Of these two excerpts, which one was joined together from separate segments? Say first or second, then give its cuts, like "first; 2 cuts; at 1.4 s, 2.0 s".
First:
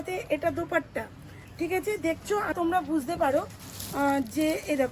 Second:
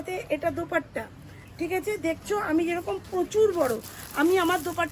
first; 1 cut; at 2.5 s